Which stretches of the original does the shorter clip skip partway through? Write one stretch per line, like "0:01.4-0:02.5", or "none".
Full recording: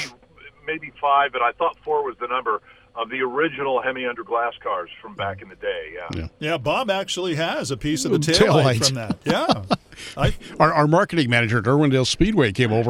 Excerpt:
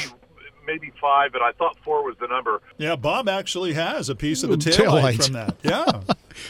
0:02.7-0:06.3